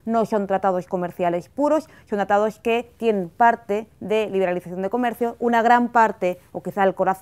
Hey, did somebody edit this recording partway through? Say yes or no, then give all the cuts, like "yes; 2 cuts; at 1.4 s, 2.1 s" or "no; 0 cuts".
yes; 1 cut; at 1.8 s